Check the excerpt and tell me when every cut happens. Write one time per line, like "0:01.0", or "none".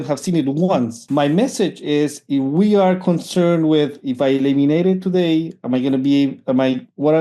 0:01.0